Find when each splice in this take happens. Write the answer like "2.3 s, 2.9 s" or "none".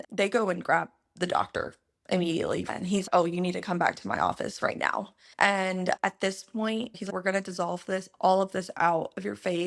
2.7 s, 6.0 s

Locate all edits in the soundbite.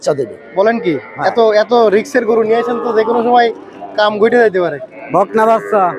4.9 s

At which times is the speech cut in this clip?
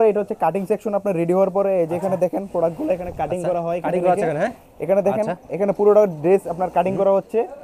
none

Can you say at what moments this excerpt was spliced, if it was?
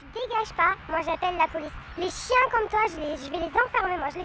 none

